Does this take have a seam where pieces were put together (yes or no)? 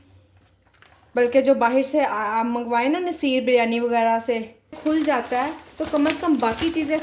yes